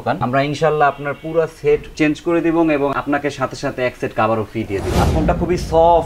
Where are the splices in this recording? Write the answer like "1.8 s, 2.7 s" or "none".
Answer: 4.9 s